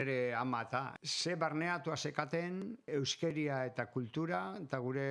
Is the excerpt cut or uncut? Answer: cut